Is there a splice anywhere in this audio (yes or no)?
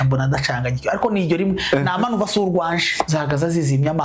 yes